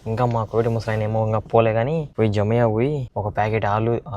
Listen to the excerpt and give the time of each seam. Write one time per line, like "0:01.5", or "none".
0:02.1
0:03.1